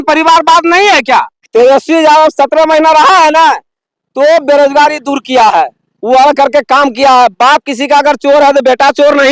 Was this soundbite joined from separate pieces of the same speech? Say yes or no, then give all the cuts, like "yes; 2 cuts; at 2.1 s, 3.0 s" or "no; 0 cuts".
yes; 1 cut; at 1.0 s